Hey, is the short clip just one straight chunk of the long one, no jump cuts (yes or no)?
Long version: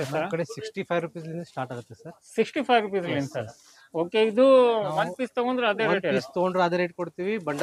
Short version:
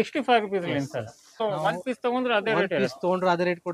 no